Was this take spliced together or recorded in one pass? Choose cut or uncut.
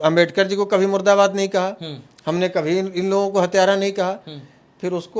uncut